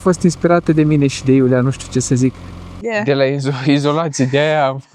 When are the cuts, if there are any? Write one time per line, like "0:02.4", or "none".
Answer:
0:02.8